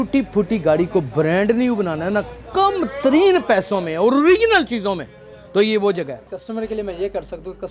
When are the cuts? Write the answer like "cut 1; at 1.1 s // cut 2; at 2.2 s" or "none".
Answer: cut 1; at 6.3 s